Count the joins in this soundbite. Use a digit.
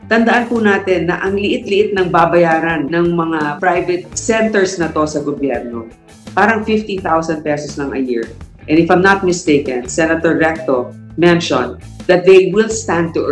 1